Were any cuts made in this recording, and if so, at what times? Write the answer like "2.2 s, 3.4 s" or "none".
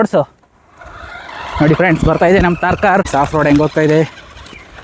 3.1 s